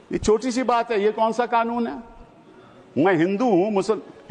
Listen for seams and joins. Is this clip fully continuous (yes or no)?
yes